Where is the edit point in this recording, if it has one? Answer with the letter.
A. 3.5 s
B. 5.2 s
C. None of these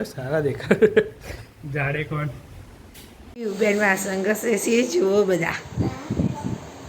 A